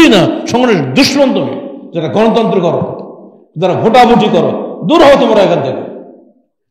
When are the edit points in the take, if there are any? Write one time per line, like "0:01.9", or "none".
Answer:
none